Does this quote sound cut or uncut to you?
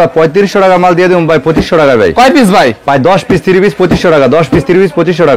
uncut